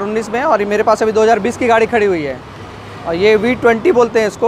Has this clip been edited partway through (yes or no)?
no